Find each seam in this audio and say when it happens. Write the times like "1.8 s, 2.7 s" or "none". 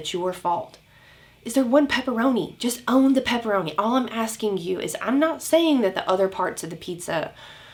none